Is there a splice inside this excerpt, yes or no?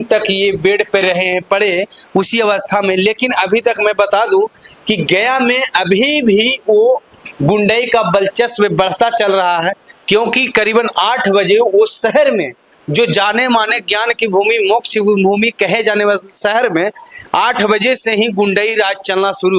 no